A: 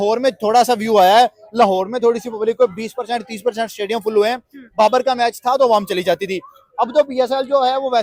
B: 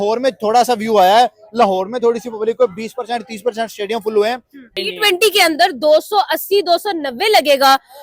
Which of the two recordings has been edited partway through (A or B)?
B